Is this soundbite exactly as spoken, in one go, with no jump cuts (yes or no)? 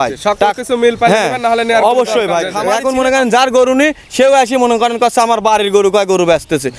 no